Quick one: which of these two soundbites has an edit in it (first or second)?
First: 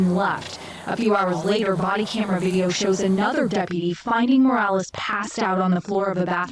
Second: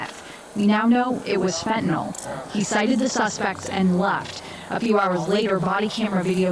second